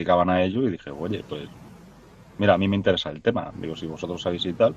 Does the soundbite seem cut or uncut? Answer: uncut